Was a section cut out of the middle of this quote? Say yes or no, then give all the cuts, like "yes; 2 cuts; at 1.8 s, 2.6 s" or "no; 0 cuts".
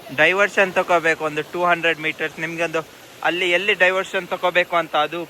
no; 0 cuts